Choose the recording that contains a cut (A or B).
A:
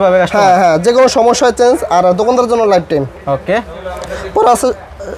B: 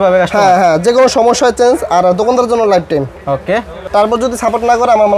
B